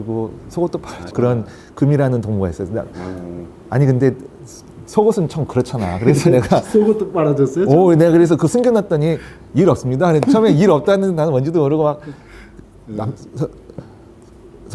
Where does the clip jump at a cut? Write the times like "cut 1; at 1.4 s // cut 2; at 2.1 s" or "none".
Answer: cut 1; at 1.1 s